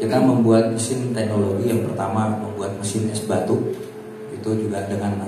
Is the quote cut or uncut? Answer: uncut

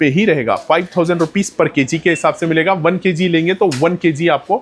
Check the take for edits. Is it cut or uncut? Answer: uncut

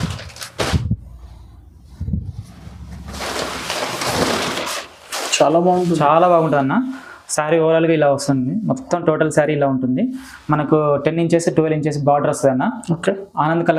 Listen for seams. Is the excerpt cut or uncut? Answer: uncut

